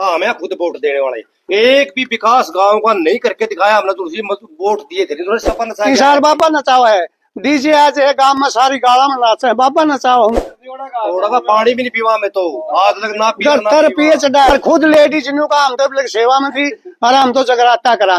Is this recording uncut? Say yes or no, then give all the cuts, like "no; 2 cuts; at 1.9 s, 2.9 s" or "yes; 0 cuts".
no; 3 cuts; at 5.4 s, 10.4 s, 14.5 s